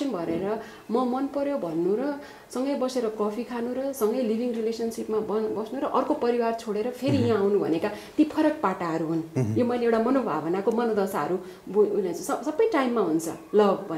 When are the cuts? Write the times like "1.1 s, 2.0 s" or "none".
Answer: none